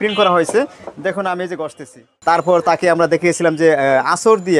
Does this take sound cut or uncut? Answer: cut